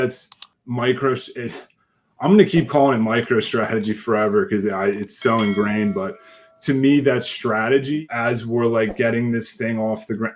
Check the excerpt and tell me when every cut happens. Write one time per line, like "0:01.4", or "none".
0:08.1